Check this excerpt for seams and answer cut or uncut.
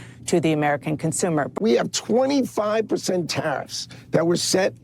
cut